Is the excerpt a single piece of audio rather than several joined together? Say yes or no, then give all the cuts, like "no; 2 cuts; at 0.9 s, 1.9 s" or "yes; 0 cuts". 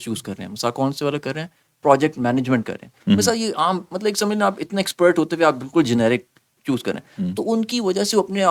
yes; 0 cuts